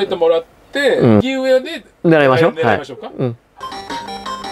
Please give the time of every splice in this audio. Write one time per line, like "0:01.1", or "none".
0:01.2
0:03.5

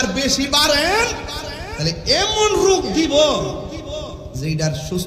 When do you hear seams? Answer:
none

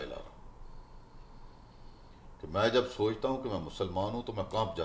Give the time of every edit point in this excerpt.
none

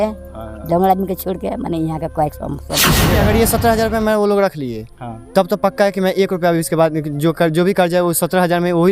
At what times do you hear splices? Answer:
0:03.1

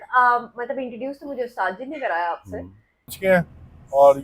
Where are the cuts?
0:03.2

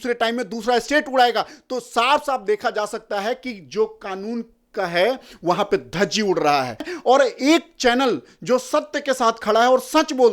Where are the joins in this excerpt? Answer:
0:06.9

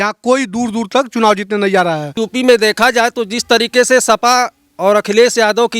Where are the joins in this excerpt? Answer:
0:02.2

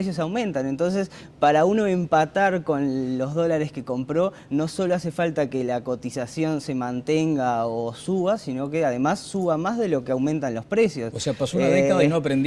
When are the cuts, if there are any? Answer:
0:11.1

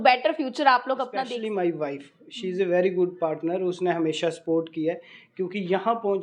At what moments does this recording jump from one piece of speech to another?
0:01.1

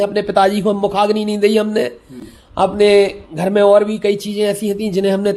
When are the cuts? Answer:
none

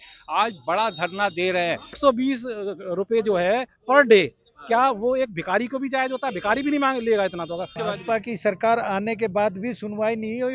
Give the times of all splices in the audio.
0:02.0
0:07.7

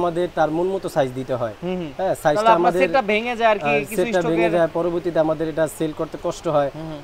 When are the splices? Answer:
none

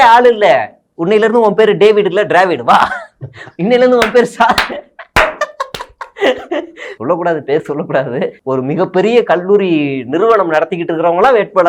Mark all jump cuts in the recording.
0:06.9
0:08.4

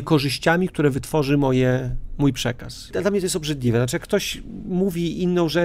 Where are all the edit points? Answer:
0:02.9

